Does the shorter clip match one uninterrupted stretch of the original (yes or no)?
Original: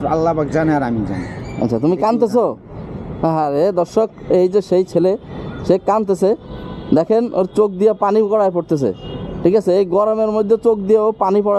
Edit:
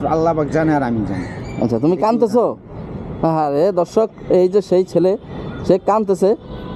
yes